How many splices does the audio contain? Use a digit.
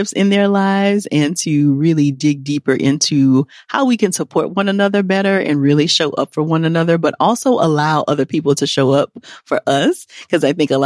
0